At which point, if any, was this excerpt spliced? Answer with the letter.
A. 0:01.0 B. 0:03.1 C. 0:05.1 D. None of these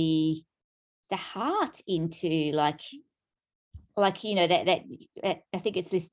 D